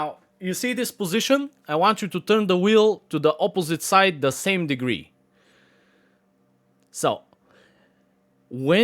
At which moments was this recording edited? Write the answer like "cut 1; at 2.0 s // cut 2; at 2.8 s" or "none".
none

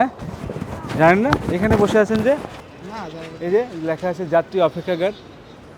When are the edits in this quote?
cut 1; at 2.6 s

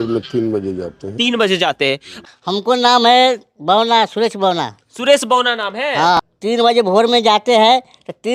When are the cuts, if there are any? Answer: cut 1; at 2.1 s // cut 2; at 6.3 s

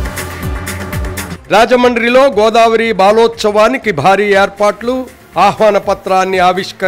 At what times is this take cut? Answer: cut 1; at 1.3 s

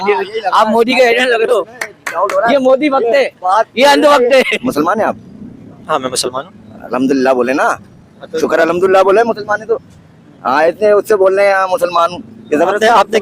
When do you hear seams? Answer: cut 1; at 4.5 s

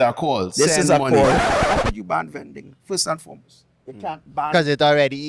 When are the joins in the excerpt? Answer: cut 1; at 1.5 s

